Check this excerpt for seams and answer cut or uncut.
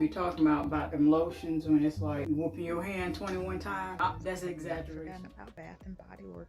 cut